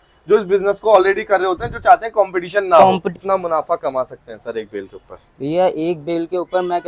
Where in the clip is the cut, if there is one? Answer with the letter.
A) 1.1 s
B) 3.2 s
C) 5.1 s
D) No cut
B